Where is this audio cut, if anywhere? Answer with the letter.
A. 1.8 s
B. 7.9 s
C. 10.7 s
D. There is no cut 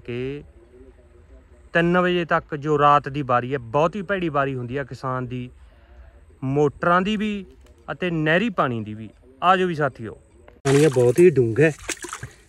C